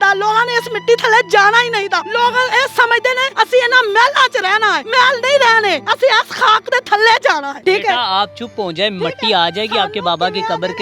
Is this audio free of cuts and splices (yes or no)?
no